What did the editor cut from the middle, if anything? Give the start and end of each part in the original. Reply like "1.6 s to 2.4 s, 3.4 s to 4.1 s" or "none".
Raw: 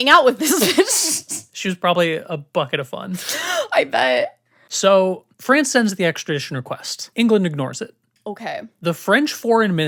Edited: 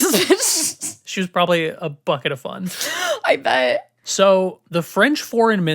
4.4 s to 4.6 s, 5.3 s to 8.7 s

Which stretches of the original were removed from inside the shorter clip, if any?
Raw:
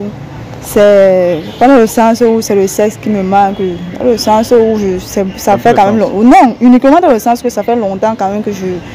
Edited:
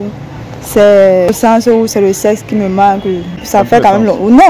1.4 s to 1.9 s, 3.9 s to 5.3 s

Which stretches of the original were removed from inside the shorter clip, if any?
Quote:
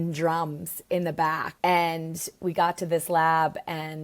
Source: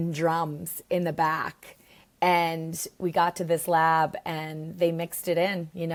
1.5 s to 2.0 s

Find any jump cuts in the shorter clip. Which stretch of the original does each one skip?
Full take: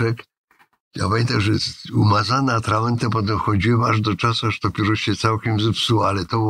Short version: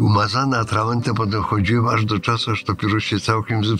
none

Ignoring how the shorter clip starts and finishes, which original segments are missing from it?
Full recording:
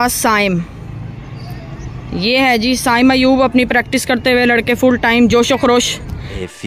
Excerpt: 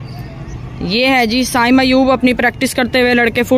none

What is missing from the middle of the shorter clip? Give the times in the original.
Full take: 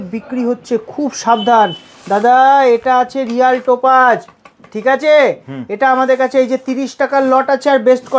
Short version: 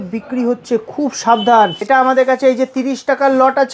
1.8 s to 5.7 s

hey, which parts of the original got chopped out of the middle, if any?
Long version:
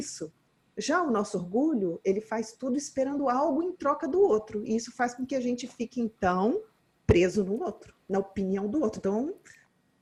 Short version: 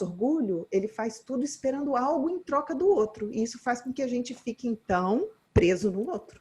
6.7 s to 6.9 s

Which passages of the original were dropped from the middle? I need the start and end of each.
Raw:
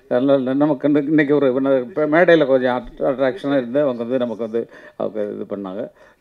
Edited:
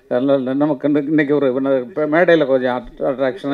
none

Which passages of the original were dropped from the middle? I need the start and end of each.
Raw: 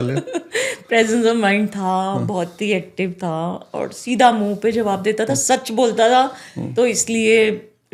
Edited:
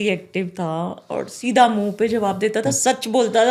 none

